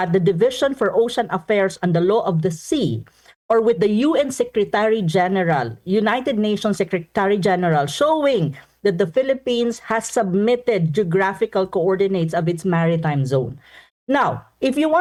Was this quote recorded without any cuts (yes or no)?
yes